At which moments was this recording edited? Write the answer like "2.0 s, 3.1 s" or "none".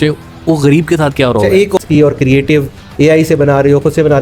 1.8 s